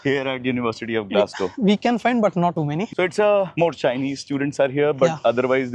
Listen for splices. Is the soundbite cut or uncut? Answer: uncut